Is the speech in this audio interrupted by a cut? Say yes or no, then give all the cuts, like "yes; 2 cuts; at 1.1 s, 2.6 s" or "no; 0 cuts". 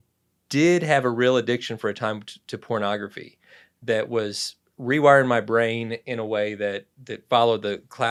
no; 0 cuts